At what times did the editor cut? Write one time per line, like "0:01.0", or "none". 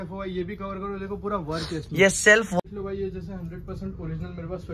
0:02.6